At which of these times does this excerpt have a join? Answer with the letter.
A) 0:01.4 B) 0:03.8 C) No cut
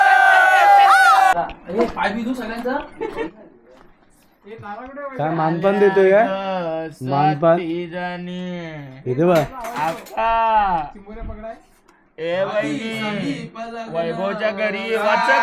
A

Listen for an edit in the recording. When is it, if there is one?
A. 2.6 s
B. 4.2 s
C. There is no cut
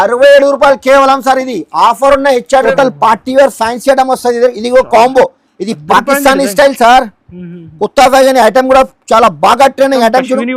A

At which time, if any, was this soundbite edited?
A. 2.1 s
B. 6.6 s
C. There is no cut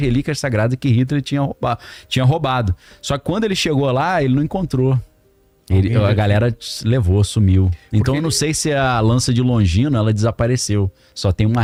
C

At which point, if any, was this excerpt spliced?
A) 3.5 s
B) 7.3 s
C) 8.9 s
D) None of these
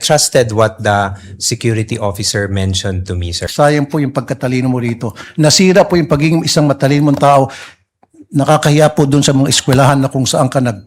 A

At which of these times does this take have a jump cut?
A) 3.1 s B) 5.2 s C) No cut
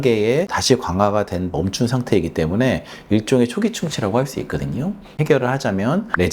B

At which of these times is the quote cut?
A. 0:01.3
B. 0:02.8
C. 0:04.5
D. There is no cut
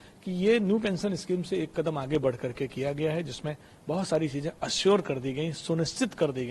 D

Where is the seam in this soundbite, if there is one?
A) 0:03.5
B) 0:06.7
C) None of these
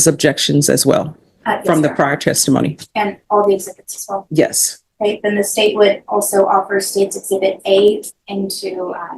B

